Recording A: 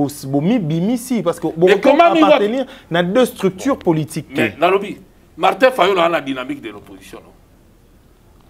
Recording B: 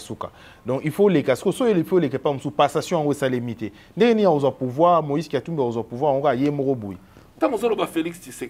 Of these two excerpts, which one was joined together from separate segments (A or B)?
B